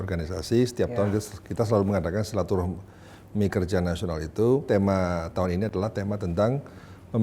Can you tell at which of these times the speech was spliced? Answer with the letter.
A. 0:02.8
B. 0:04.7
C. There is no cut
B